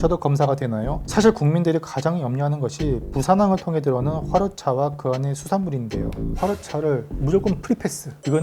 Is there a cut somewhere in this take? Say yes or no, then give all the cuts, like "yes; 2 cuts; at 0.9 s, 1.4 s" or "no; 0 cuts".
yes; 1 cut; at 6.2 s